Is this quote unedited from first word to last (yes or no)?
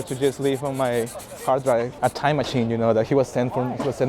no